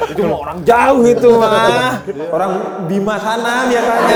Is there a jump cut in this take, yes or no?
no